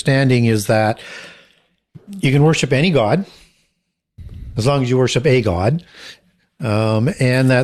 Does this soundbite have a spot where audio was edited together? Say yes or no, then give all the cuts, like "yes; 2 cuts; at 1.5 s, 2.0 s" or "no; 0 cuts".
no; 0 cuts